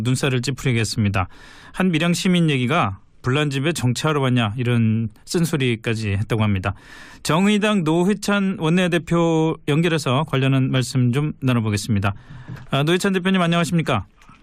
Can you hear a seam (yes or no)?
no